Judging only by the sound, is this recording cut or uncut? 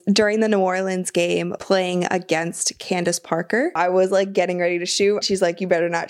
cut